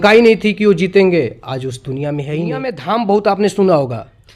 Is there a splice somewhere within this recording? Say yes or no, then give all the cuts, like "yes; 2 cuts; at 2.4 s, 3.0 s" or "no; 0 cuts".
yes; 1 cut; at 2.8 s